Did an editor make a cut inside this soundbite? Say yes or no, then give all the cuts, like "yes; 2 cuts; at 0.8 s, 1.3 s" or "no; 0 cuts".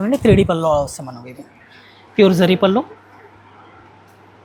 no; 0 cuts